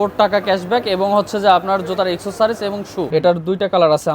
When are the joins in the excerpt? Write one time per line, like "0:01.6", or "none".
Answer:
0:03.1